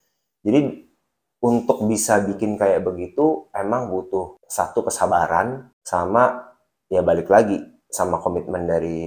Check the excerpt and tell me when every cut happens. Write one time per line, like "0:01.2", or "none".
0:04.4
0:05.7